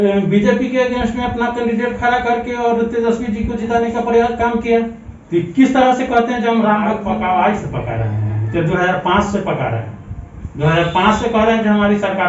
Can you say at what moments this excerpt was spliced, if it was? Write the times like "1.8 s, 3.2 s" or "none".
7.1 s